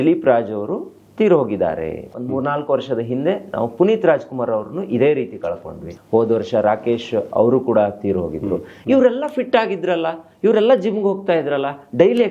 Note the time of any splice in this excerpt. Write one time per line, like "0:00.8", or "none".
0:02.1
0:05.9
0:08.7

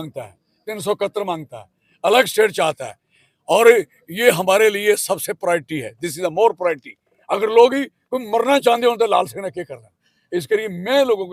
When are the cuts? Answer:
none

